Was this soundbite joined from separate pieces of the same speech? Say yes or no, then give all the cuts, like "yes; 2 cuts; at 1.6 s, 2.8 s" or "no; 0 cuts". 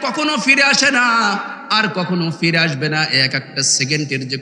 no; 0 cuts